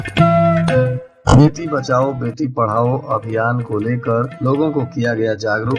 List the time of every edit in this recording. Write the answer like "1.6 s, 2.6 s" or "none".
1.1 s